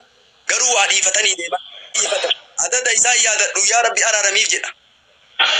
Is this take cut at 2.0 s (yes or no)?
yes